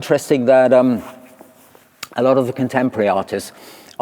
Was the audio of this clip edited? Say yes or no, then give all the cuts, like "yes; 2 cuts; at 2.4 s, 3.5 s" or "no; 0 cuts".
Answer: no; 0 cuts